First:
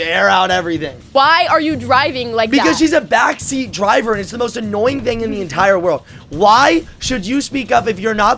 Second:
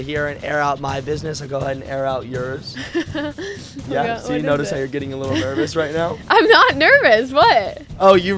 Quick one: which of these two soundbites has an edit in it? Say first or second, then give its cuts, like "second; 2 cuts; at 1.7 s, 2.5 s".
first; 1 cut; at 1.0 s